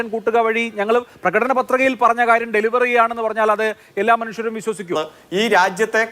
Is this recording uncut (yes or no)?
no